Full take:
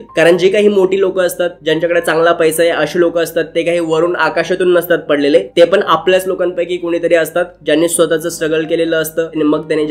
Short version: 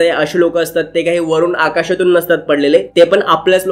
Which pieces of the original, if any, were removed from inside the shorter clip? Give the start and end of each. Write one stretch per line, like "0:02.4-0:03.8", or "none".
none